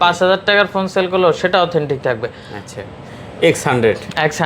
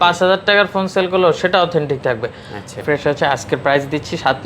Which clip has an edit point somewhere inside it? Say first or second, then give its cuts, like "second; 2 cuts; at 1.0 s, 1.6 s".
second; 1 cut; at 2.8 s